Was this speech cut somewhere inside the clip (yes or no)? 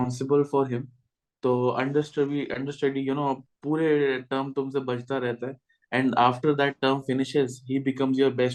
no